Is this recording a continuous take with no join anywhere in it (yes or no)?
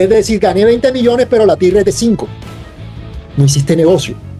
yes